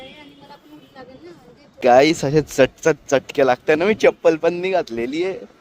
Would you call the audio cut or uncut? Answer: cut